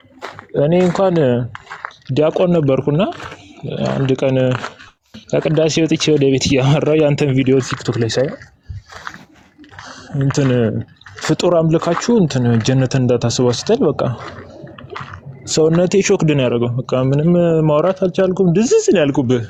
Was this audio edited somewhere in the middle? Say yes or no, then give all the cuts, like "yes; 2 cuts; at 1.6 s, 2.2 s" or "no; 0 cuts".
no; 0 cuts